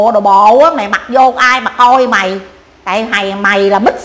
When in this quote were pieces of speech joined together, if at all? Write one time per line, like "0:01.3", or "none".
none

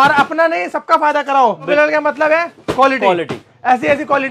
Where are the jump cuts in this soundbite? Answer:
0:01.7

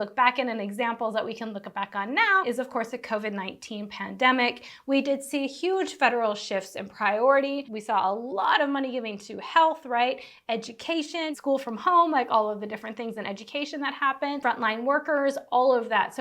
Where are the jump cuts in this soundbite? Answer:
0:02.4
0:11.4

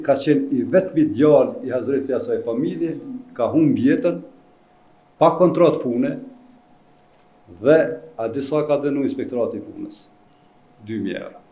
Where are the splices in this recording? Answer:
none

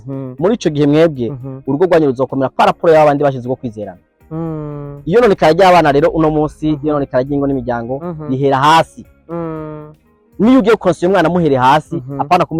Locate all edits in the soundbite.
none

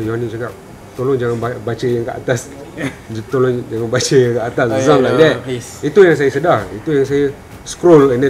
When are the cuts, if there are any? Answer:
none

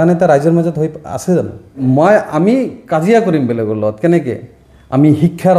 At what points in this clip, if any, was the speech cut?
0:01.8

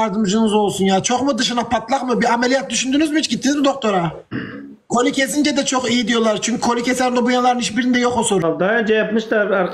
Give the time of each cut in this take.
0:04.2
0:08.4

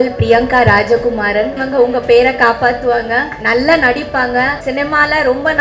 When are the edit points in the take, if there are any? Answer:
0:01.6
0:03.4
0:04.6

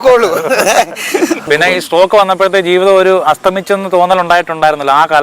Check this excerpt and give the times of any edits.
0:01.5

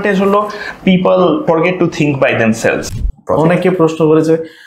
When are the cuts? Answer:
0:01.4
0:02.8

